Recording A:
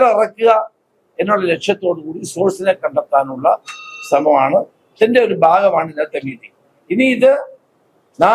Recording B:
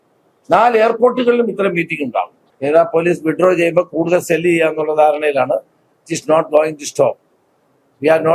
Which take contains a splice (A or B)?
B